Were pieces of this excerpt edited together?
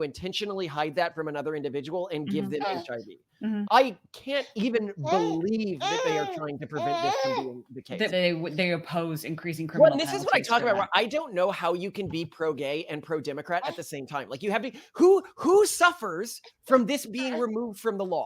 yes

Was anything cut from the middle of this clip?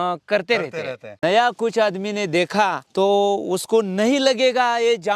yes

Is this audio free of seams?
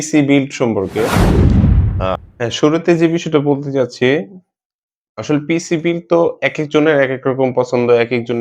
no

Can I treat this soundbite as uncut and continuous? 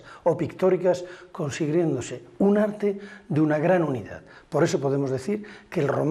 no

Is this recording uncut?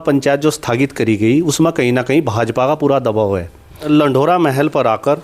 no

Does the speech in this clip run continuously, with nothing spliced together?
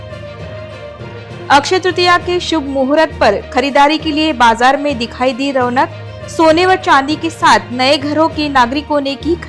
no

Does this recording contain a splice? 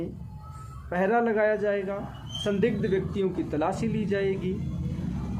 no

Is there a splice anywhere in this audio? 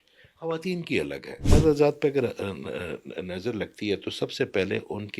yes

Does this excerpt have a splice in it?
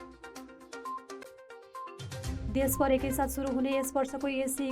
yes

